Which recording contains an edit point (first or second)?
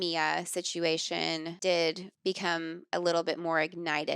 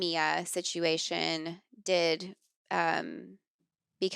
first